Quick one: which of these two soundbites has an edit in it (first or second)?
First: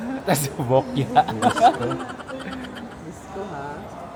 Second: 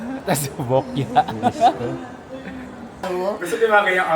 second